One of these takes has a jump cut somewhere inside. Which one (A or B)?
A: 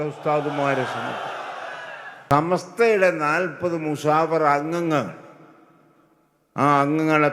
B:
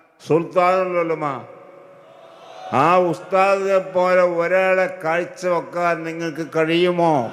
A